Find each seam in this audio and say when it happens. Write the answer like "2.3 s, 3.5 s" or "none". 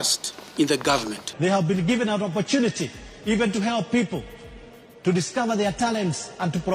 1.3 s